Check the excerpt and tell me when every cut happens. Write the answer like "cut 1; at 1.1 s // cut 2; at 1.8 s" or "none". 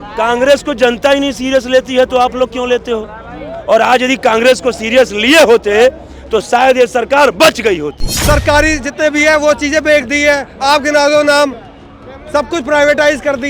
cut 1; at 8.2 s